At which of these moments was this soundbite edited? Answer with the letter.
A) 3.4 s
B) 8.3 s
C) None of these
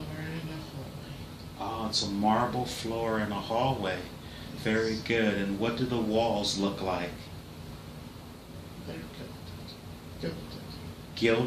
A